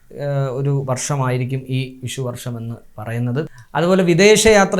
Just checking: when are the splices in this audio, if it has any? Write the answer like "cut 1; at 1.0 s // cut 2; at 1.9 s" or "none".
cut 1; at 3.6 s